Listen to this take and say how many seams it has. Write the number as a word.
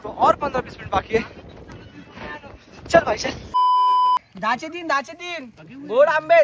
one